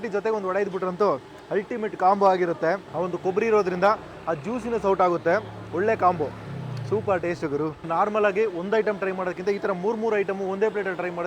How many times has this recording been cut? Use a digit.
2